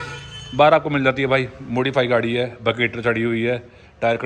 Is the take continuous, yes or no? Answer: yes